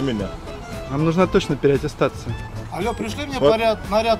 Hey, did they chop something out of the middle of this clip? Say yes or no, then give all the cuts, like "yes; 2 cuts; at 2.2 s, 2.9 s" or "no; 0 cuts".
no; 0 cuts